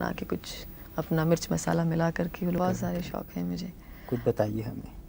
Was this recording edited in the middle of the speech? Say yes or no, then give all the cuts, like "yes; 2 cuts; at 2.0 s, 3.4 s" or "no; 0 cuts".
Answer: yes; 1 cut; at 2.6 s